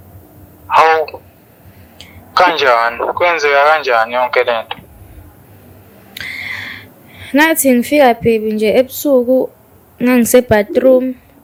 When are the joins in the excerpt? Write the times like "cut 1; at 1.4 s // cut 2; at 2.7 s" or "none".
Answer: none